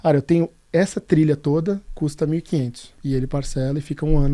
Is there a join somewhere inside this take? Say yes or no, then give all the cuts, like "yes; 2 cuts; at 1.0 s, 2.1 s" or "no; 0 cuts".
yes; 1 cut; at 2.9 s